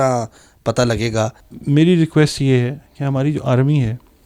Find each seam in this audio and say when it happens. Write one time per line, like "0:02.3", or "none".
0:01.4

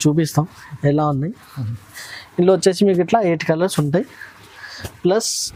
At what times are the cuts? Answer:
none

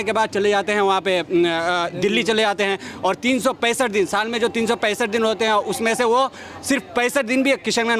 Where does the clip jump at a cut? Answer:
none

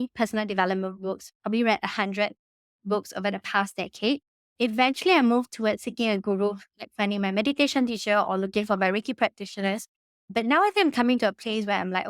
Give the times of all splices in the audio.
0:04.4

